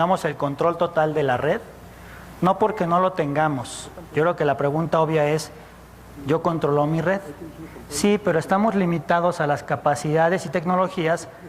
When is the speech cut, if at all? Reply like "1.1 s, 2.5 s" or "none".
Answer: 6.9 s